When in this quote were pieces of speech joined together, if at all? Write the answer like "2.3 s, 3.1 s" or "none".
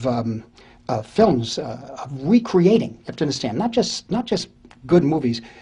none